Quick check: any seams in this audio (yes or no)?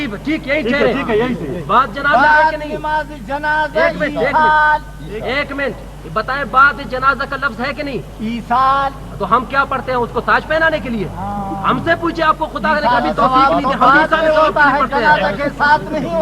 no